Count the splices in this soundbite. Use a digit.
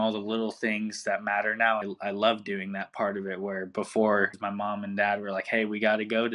2